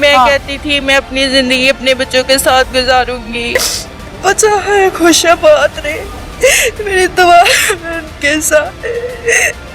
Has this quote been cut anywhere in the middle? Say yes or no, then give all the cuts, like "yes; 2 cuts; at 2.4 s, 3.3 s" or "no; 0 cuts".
yes; 1 cut; at 3.6 s